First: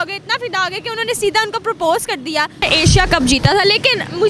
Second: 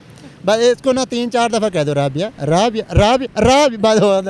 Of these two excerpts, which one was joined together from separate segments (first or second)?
first